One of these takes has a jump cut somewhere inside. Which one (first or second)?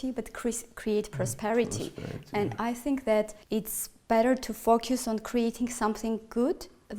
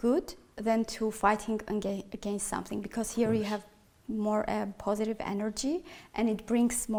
first